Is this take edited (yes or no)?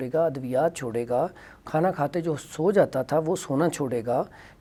no